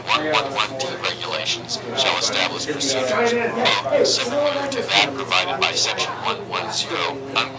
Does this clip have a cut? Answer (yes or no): no